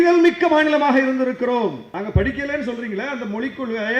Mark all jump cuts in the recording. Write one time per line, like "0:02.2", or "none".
0:01.9